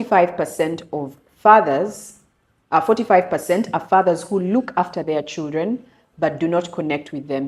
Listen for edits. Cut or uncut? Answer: uncut